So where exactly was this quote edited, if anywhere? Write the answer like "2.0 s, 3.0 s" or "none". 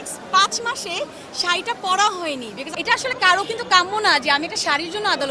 2.6 s

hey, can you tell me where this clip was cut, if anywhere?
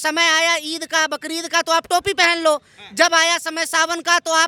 none

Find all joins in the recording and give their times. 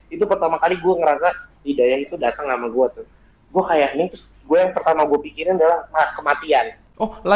none

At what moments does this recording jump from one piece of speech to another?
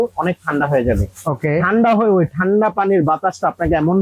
none

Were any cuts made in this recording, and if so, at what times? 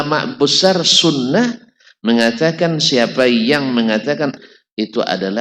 4.4 s

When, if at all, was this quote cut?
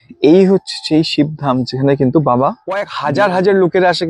3.0 s

